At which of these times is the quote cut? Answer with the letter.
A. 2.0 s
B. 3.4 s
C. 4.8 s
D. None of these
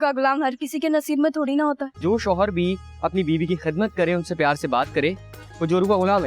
A